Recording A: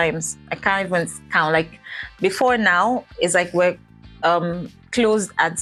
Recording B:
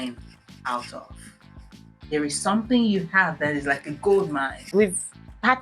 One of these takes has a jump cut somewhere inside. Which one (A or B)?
B